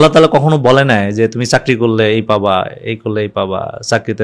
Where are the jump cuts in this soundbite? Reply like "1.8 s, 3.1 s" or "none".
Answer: none